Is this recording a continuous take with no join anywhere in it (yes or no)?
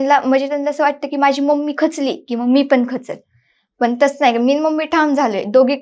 yes